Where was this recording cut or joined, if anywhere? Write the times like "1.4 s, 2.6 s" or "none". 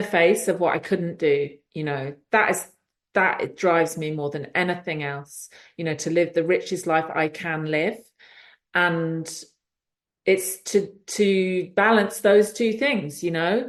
none